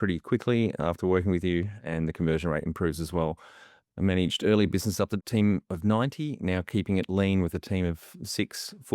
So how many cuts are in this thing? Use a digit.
1